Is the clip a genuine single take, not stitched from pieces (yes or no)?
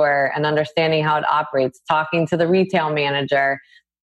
yes